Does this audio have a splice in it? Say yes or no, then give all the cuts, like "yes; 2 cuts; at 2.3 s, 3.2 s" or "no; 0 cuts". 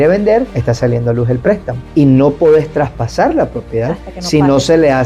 yes; 1 cut; at 1.8 s